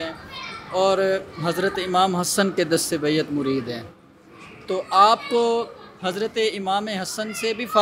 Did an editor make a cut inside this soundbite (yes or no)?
no